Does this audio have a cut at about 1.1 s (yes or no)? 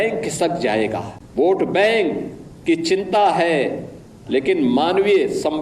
yes